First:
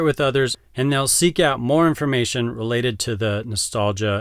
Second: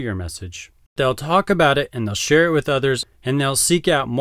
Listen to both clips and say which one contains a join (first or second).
second